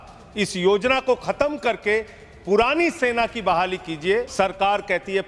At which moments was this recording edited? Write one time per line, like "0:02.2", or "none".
0:04.3